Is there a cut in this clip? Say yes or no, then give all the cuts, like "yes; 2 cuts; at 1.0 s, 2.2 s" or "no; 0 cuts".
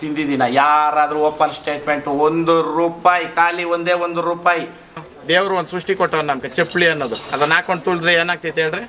yes; 1 cut; at 5.1 s